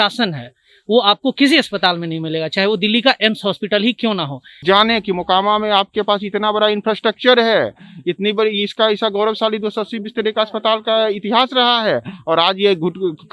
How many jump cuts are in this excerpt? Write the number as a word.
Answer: one